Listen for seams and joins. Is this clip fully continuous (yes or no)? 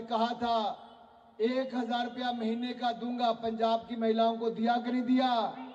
yes